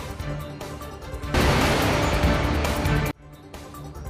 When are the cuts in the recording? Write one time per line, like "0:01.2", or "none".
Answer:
0:01.3
0:03.1